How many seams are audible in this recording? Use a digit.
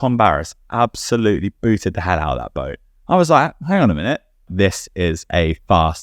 1